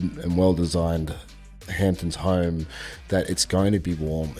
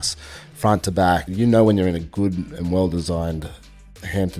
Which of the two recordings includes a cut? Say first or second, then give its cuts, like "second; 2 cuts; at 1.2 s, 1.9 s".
second; 1 cut; at 1.3 s